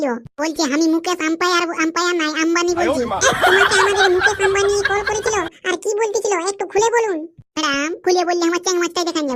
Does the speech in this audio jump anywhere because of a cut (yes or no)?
no